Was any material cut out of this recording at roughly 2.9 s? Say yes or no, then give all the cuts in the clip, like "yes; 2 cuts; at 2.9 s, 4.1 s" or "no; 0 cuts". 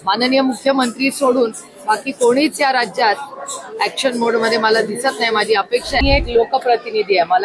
no; 1 cut; at 6.0 s